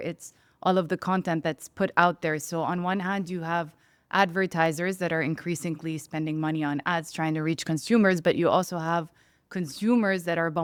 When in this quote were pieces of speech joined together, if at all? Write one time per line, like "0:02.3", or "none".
none